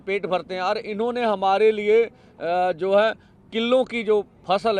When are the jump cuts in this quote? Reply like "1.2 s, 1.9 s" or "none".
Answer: none